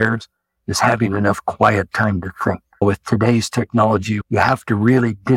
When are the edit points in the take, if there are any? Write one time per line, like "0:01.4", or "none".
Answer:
0:02.8
0:04.2

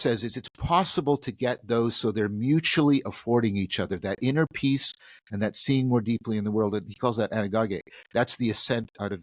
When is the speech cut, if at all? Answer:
none

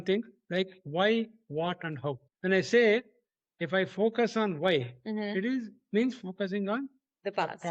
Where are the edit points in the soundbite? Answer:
0:02.3

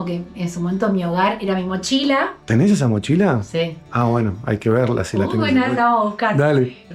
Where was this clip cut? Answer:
none

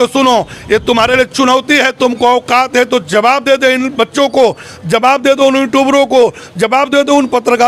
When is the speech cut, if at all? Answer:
none

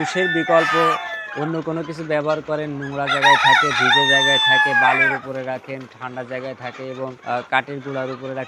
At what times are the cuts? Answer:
0:07.2

